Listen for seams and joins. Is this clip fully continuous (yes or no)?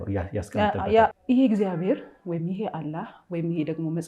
no